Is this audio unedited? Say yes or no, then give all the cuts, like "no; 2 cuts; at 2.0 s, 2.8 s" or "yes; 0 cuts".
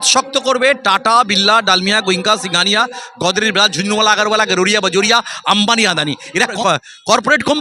no; 1 cut; at 6.5 s